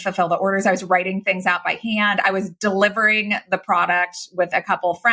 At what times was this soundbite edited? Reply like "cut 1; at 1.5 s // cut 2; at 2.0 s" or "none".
none